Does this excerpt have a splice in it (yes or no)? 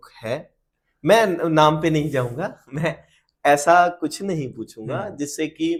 no